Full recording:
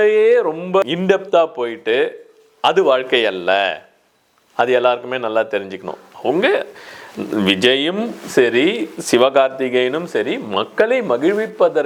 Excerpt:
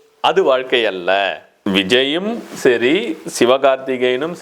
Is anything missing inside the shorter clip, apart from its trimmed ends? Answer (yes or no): yes